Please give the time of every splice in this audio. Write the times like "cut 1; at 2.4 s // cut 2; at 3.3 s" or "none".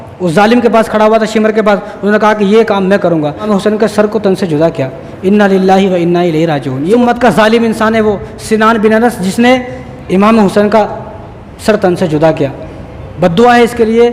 cut 1; at 3.5 s // cut 2; at 7.0 s